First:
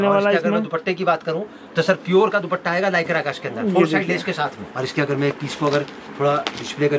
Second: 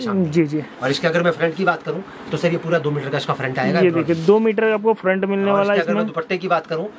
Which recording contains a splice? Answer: first; 1 cut; at 4.6 s

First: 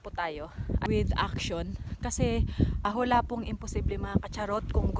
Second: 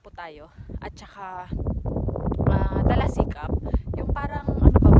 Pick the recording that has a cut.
first; 2 cuts; at 0.8 s, 2.8 s

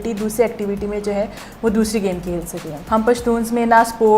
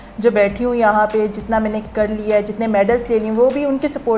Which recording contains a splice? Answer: first; 1 cut; at 2.7 s

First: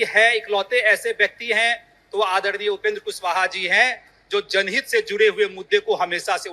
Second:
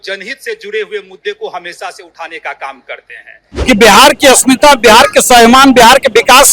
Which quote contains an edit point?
second; 1 cut; at 3.5 s

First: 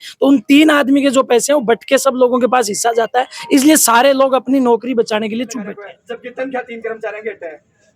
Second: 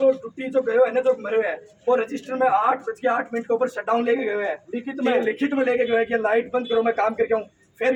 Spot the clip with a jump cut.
first; 1 cut; at 5.9 s

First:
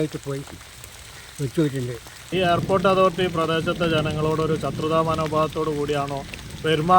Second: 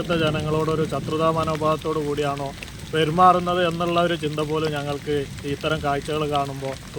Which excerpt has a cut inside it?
first; 1 cut; at 2.2 s

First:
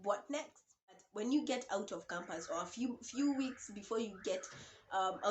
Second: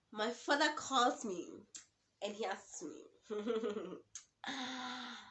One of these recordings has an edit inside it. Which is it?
first; 1 cut; at 1.1 s

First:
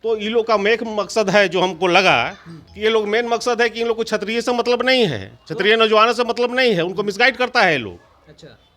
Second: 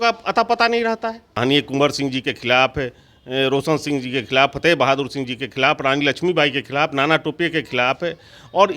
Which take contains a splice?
second; 1 cut; at 1.3 s

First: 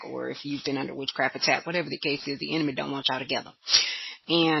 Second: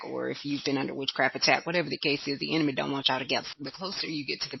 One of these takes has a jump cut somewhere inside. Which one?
second; 1 cut; at 3.6 s

